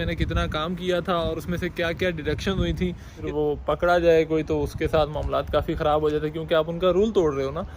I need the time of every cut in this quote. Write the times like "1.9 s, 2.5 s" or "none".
3.2 s